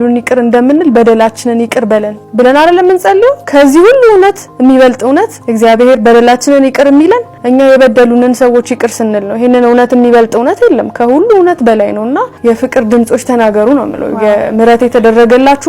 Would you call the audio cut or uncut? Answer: cut